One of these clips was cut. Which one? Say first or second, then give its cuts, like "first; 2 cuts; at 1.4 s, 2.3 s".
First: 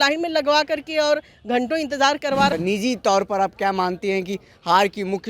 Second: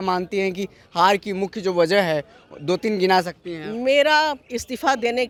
first; 1 cut; at 2.5 s